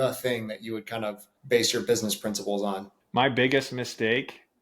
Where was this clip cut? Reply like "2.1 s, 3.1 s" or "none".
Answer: 1.3 s, 2.9 s